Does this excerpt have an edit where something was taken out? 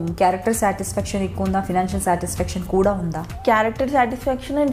yes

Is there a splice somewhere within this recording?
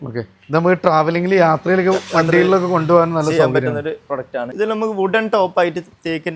yes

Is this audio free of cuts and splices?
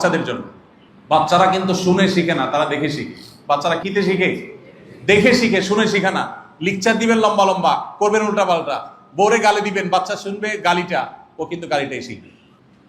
no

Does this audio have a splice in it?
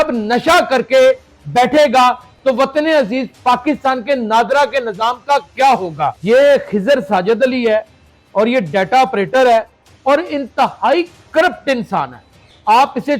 yes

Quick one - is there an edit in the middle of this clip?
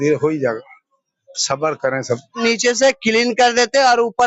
yes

